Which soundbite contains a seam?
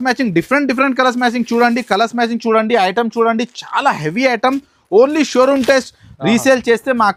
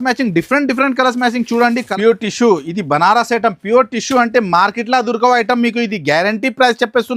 second; 1 cut; at 1.9 s

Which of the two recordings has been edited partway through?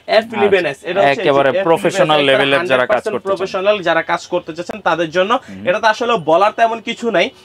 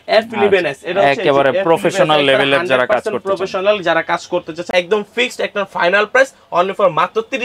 second; 1 cut; at 4.7 s

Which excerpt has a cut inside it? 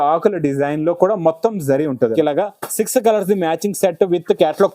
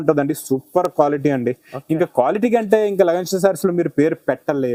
first; 1 cut; at 2.1 s

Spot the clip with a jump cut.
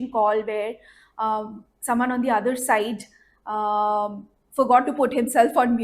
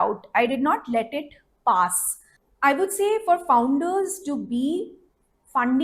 second; 1 cut; at 2.4 s

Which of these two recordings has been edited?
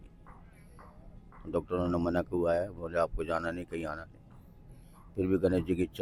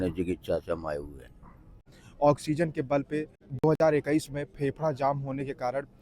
second; 2 cuts; at 1.9 s, 3.5 s

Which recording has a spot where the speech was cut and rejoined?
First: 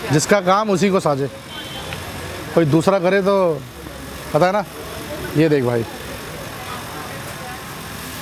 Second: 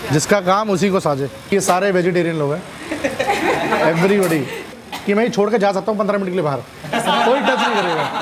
second; 2 cuts; at 1.5 s, 4.8 s

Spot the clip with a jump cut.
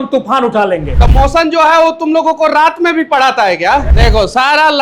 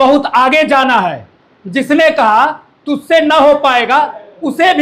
first; 2 cuts; at 1.0 s, 3.9 s

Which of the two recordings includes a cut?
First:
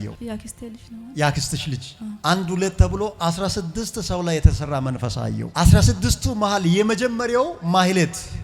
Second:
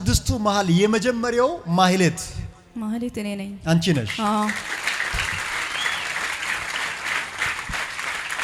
first; 1 cut; at 2.2 s

